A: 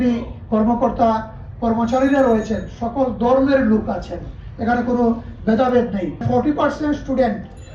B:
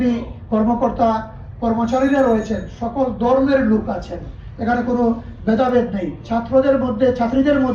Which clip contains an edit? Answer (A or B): A